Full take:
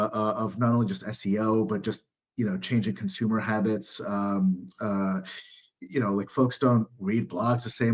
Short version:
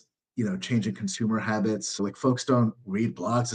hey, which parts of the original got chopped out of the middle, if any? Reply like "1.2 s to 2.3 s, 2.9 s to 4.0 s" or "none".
4.0 s to 6.1 s